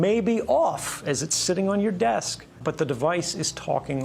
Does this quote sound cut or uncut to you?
cut